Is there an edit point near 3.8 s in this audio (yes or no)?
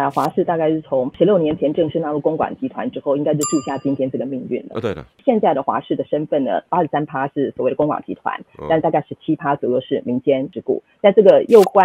no